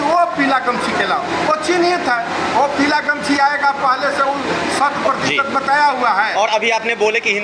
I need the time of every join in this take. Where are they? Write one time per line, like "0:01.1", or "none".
none